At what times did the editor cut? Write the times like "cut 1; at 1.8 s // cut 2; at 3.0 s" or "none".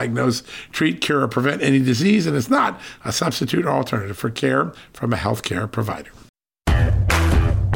cut 1; at 6.4 s